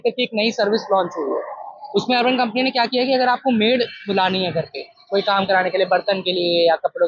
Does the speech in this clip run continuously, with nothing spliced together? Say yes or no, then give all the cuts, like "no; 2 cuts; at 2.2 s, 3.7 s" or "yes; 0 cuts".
yes; 0 cuts